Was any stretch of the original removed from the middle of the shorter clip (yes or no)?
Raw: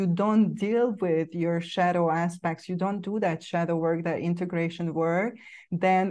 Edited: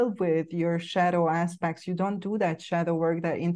no